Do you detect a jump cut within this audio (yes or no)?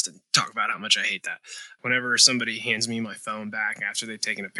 yes